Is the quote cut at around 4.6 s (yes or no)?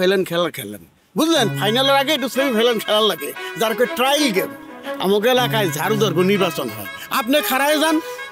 yes